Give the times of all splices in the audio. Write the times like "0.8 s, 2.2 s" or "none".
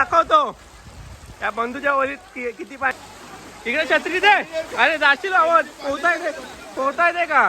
3.0 s